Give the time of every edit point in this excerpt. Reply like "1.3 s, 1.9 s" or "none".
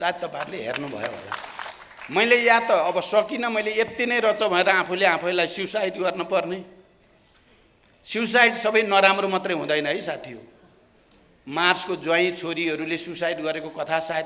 1.7 s